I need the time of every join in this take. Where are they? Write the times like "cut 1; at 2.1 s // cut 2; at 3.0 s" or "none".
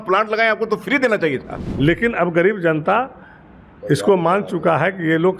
cut 1; at 1.6 s